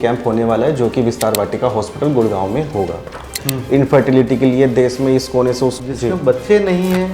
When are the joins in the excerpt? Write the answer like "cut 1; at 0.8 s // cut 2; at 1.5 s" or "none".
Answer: cut 1; at 3.5 s // cut 2; at 5.8 s